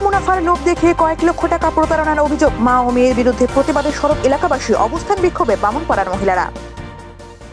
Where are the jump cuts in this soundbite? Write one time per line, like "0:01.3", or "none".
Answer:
none

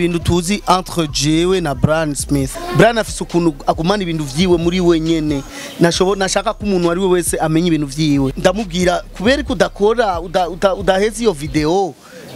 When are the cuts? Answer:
0:02.6
0:08.3

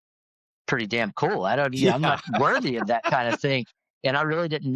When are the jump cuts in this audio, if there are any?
none

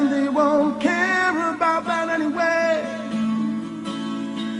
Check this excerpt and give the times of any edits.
none

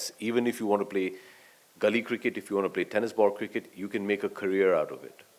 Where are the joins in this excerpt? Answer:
none

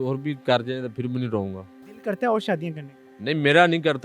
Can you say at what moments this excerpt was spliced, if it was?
0:01.8

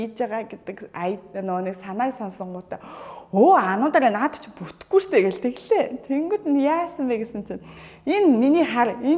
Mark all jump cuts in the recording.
none

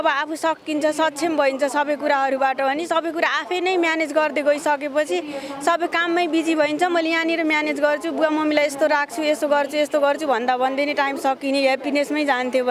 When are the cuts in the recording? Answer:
none

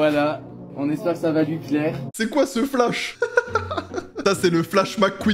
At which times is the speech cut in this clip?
0:02.0
0:04.2

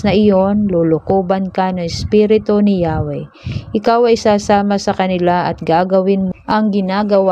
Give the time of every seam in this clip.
0:06.3

